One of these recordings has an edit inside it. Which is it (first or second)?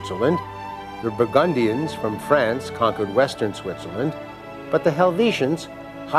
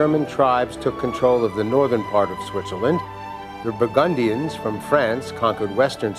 first